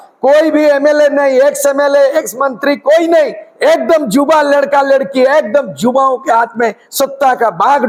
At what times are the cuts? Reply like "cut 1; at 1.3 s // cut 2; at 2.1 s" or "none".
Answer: none